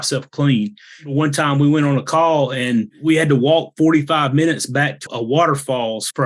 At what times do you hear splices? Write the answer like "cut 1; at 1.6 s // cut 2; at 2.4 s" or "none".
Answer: cut 1; at 1.1 s // cut 2; at 2.9 s // cut 3; at 5.1 s